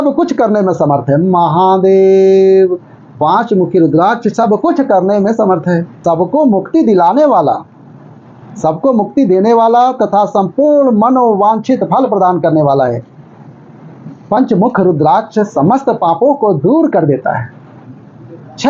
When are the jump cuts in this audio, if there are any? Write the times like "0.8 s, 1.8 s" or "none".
none